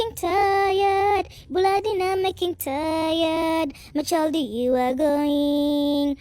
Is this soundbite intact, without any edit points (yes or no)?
yes